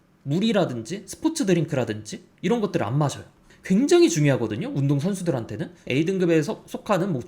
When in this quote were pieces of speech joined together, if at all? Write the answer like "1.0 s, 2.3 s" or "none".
3.5 s, 5.8 s